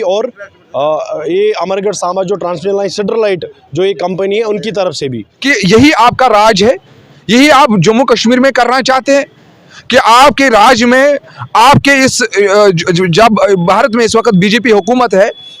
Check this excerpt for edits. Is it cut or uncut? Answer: cut